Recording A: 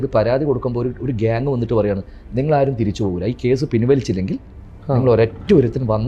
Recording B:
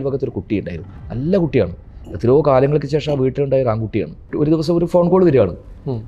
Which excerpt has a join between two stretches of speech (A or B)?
B